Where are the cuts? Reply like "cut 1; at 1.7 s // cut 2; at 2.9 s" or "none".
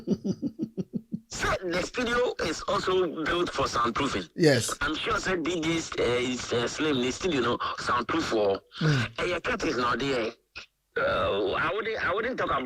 cut 1; at 10.8 s